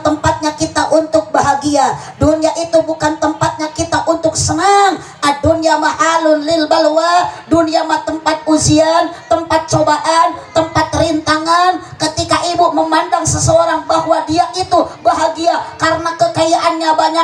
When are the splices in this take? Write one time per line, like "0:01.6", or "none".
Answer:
none